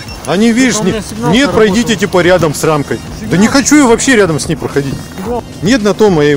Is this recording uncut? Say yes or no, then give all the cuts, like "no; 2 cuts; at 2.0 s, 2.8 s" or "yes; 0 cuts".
no; 1 cut; at 5.4 s